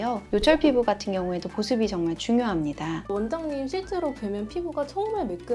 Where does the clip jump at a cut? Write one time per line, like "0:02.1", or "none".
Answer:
0:03.0

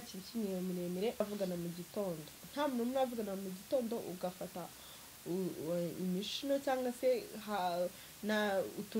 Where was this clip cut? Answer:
0:01.2

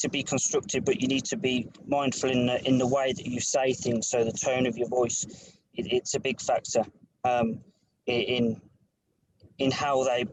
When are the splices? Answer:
none

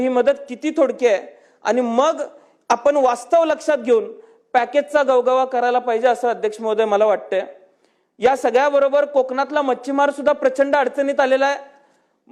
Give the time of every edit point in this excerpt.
none

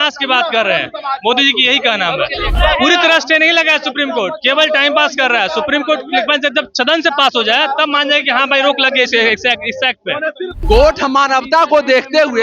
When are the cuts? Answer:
0:02.5
0:10.5

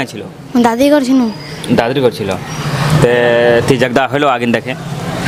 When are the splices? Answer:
none

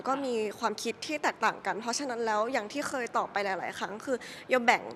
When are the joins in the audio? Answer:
none

